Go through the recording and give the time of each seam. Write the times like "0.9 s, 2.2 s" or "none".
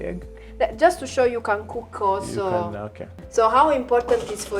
3.2 s

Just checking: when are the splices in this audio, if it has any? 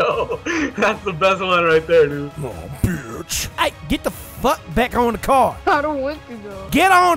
3.4 s

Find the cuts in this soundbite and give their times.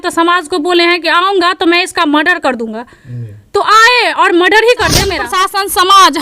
5.3 s

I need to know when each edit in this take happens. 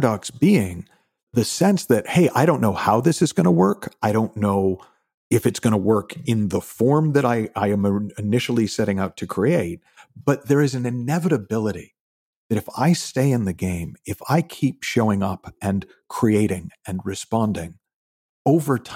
1.3 s

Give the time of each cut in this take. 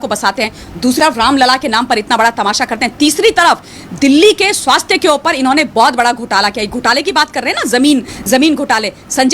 1.0 s

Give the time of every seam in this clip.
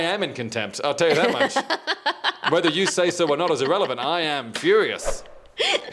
none

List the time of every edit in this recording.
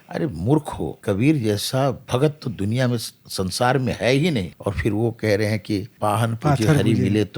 1.0 s, 4.5 s, 5.9 s

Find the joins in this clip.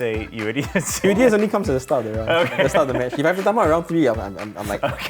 1.0 s

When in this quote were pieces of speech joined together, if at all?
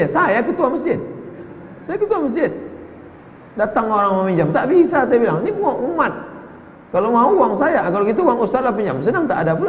none

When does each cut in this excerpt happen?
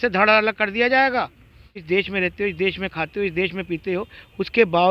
1.8 s

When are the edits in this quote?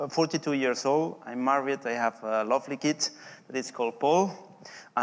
1.8 s

